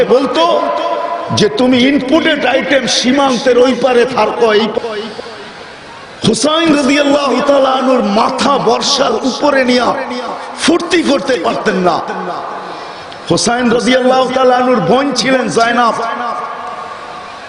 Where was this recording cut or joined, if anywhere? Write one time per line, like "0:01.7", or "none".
0:04.8